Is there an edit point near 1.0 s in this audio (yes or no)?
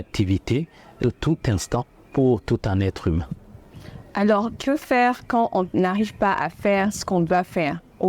yes